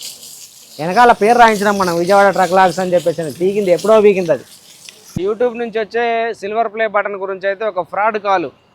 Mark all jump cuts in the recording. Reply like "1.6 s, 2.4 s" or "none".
5.2 s